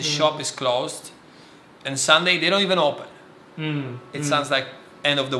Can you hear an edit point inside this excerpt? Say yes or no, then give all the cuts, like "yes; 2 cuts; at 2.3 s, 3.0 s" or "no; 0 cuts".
no; 0 cuts